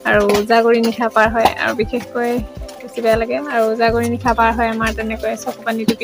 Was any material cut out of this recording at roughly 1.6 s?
no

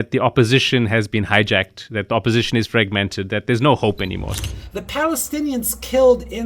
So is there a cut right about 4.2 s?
yes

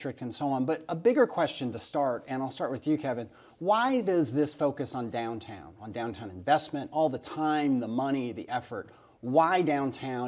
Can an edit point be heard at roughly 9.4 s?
yes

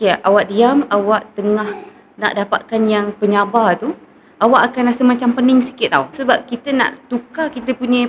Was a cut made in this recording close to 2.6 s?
no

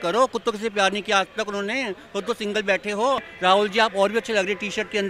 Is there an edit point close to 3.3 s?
yes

